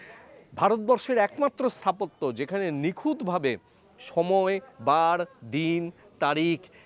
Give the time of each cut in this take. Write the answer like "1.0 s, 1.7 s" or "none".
none